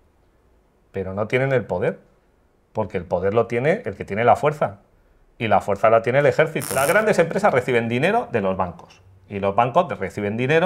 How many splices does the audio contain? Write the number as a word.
one